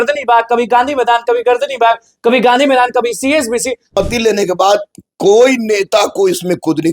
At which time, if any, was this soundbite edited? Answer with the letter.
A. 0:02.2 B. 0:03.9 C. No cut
B